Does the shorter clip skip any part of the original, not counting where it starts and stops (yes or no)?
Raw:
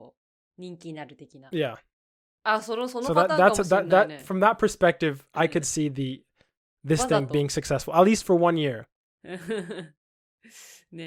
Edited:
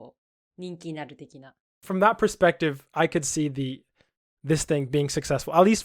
yes